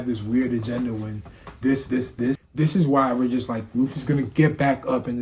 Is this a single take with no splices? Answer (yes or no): no